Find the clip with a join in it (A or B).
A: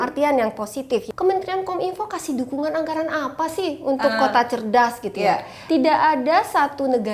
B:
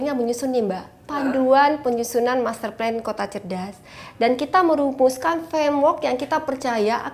A